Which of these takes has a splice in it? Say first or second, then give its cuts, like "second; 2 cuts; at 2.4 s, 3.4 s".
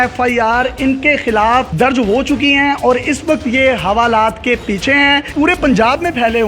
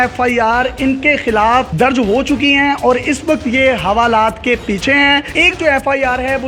first; 1 cut; at 5.3 s